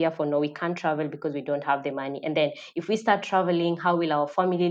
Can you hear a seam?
no; 0 cuts

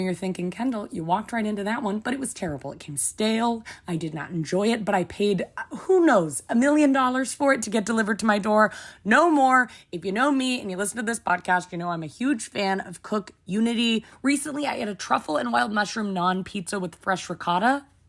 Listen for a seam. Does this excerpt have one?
yes; 2 cuts; at 3.7 s, 14.1 s

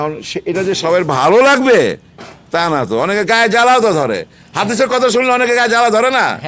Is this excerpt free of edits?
yes; 0 cuts

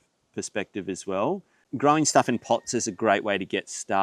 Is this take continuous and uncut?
no; 1 cut; at 1.5 s

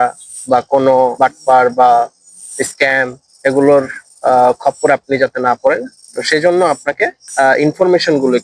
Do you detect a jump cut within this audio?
no; 0 cuts

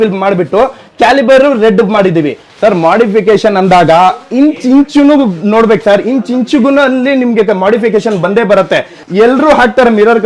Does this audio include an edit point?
yes; 2 cuts; at 2.4 s, 8.9 s

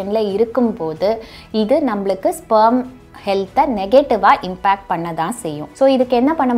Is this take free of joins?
no; 1 cut; at 5.6 s

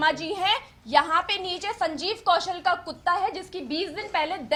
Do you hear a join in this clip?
no; 0 cuts

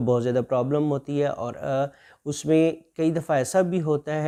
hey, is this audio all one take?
yes; 0 cuts

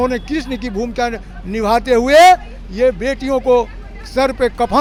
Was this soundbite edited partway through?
no; 0 cuts

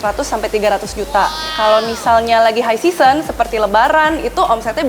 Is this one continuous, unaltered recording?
no; 1 cut; at 1.5 s

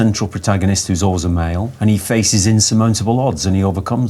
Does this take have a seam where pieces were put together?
yes; 1 cut; at 1.7 s

